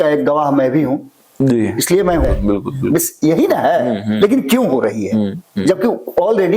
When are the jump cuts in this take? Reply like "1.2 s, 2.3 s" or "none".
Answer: 2.2 s